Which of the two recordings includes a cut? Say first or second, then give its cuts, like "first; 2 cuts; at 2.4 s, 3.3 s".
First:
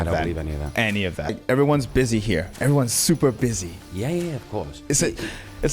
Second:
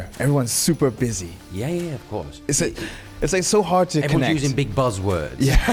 first; 1 cut; at 1.3 s